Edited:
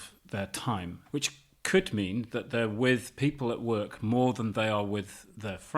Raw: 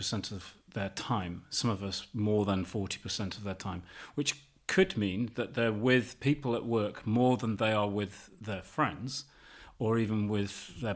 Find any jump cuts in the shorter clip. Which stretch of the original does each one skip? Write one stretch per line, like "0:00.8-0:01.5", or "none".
0:01.4-0:04.0